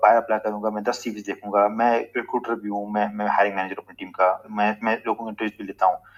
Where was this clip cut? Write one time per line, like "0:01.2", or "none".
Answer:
none